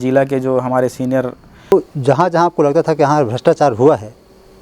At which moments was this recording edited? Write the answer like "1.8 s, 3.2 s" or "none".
1.7 s

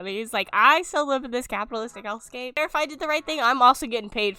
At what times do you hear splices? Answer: 2.6 s

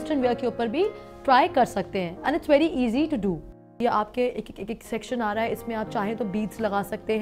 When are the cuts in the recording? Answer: 3.8 s

